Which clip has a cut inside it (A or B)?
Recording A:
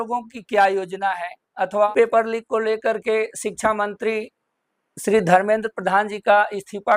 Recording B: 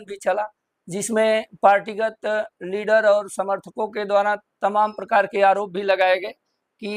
A